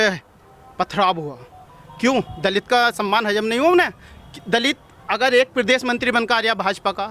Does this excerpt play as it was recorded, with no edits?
yes; 0 cuts

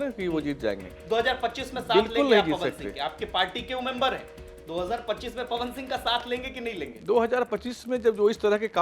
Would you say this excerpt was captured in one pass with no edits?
no; 1 cut; at 0.9 s

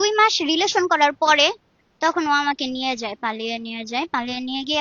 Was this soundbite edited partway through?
no; 0 cuts

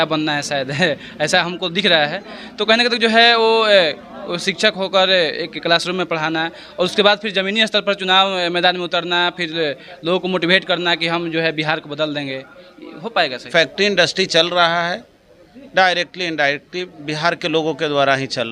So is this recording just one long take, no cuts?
no; 1 cut; at 13.5 s

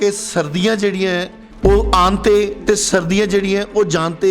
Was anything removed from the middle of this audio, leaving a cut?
yes; 1 cut; at 1.4 s

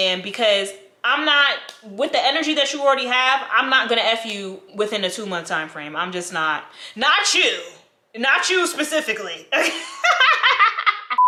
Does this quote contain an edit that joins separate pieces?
no; 0 cuts

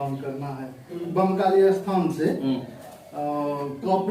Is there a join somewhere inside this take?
yes; 1 cut; at 1.1 s

